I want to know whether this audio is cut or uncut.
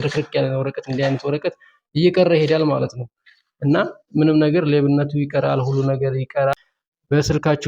cut